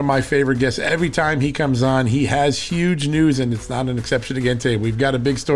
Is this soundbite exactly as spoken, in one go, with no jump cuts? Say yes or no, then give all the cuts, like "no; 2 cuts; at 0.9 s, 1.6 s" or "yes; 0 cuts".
yes; 0 cuts